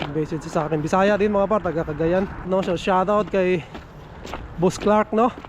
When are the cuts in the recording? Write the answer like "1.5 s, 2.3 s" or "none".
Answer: 2.5 s